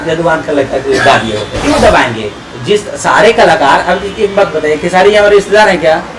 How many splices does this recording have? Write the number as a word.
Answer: one